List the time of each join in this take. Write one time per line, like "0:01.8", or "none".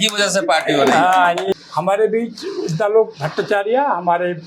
0:01.5